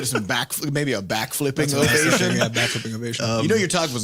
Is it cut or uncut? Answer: uncut